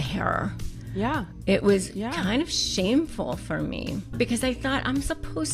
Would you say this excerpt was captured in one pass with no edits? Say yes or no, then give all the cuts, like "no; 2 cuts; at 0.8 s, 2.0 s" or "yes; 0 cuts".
no; 1 cut; at 4.2 s